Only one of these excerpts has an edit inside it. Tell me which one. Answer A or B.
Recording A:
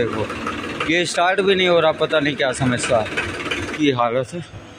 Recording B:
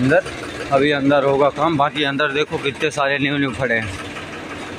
A